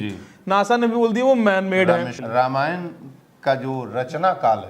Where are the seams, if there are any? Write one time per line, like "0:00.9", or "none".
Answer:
0:02.2